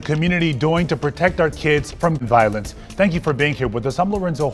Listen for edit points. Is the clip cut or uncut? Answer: uncut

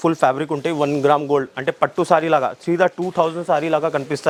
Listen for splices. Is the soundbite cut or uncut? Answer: uncut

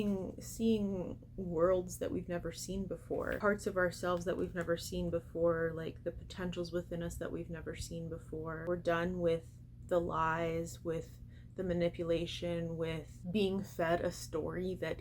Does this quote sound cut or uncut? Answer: cut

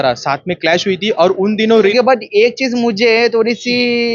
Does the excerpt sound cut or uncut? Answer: cut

